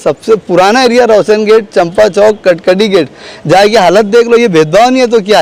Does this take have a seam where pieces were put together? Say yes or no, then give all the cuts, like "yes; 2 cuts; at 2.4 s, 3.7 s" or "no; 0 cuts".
no; 0 cuts